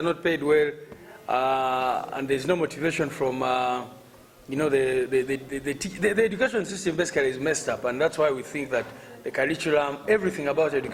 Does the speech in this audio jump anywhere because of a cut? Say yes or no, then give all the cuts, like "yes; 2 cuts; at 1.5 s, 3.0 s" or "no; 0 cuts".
no; 0 cuts